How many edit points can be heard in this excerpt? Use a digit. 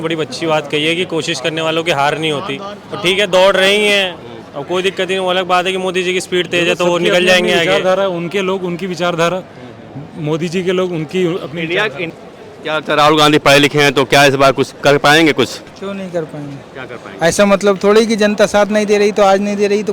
1